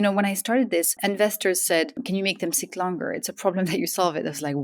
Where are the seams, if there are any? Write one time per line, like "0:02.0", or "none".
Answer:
0:01.0
0:02.0

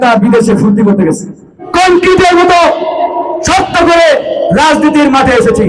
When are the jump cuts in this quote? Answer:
0:01.6

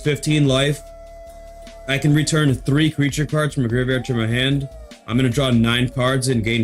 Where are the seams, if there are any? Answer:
none

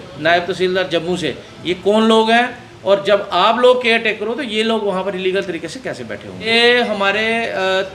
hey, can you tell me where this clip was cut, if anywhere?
none

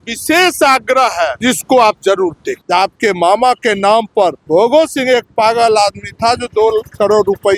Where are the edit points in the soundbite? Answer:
0:01.4
0:02.5
0:04.4

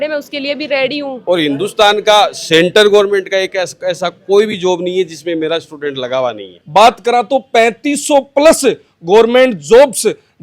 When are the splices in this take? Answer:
0:01.2
0:06.5

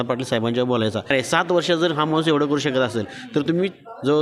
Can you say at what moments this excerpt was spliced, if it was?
0:01.1

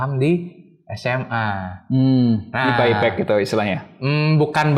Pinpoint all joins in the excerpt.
none

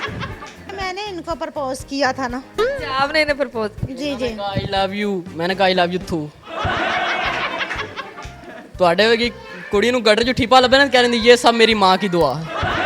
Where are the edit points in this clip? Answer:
none

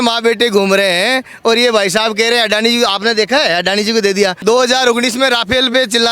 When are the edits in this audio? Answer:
0:04.4

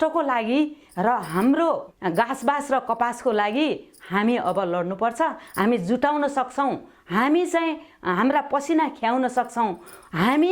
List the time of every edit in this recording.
0:01.9

